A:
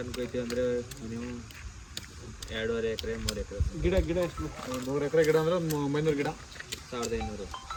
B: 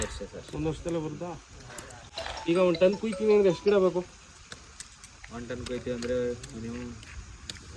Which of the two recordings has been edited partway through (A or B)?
B